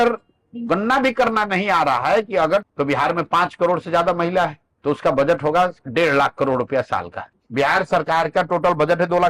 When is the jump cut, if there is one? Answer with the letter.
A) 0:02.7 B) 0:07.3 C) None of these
A